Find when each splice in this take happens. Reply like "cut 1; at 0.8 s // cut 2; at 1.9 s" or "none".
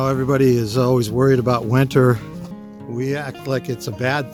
none